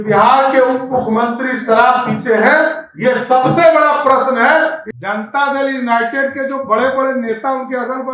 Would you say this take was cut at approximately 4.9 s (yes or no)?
yes